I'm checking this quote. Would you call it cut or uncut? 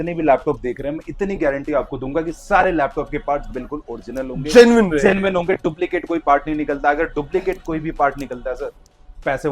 uncut